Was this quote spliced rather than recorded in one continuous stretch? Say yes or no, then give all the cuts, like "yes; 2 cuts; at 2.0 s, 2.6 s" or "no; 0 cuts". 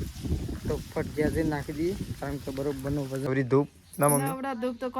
yes; 1 cut; at 3.3 s